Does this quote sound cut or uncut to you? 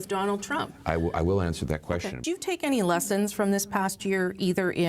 cut